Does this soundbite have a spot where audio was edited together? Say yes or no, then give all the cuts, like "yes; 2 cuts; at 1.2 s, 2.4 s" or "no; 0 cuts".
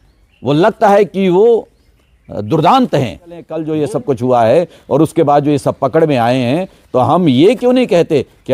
yes; 1 cut; at 3.6 s